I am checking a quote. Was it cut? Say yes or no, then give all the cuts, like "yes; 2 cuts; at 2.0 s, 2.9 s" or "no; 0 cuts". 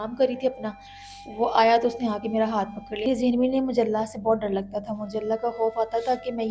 yes; 1 cut; at 3.0 s